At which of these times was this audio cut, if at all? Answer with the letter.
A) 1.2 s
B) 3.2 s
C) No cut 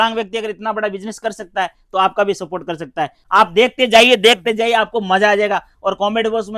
B